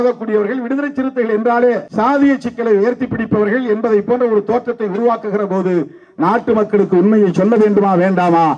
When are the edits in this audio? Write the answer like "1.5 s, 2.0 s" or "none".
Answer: 1.9 s